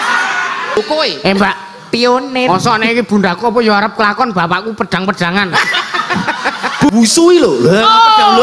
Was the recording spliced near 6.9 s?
yes; 2 cuts; at 0.8 s, 6.9 s

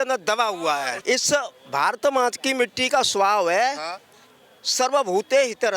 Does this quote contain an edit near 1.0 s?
yes; 1 cut; at 1.0 s

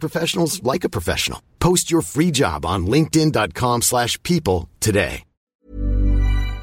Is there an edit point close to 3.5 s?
no; 1 cut; at 5.5 s

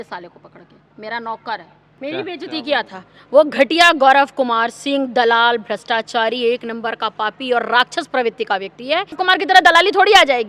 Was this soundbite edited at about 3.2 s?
no; 2 cuts; at 1.8 s, 9.2 s

